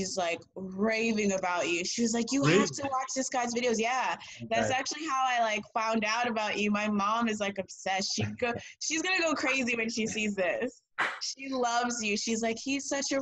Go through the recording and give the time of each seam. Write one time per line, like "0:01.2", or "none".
none